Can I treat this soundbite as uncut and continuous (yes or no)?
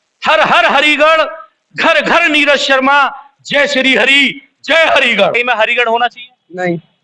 no